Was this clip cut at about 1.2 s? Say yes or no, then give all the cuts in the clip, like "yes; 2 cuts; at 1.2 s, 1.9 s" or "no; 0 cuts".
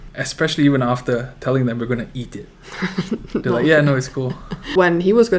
no; 0 cuts